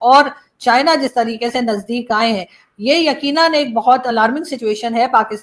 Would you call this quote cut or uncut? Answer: uncut